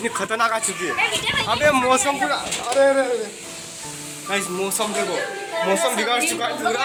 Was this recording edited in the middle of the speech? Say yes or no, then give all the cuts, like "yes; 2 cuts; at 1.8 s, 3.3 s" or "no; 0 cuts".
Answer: no; 0 cuts